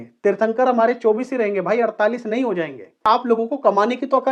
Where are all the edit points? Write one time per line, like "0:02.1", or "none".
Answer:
0:03.0